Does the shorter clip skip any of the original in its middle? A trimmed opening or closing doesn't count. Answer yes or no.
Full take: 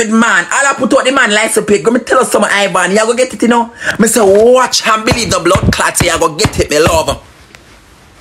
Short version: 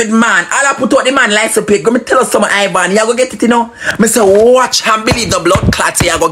no